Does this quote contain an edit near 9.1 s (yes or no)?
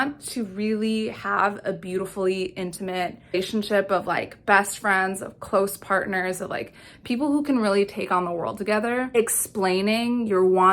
yes